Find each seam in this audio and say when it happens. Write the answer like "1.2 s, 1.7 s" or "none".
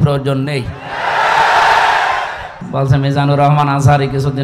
2.6 s